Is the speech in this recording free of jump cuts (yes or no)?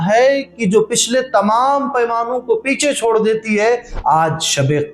no